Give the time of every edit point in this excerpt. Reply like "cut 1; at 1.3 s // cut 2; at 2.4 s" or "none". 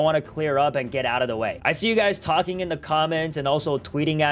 cut 1; at 1.6 s